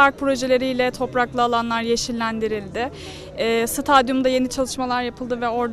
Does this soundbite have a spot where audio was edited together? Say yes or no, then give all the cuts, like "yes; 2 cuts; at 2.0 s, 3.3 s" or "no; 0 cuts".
no; 0 cuts